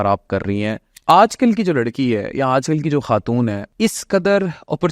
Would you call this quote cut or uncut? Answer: cut